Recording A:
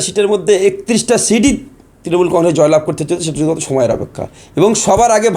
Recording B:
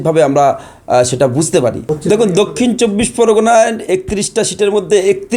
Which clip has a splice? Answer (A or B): B